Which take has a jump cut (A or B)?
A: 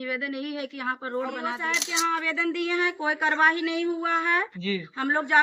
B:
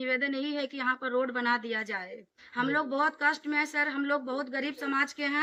A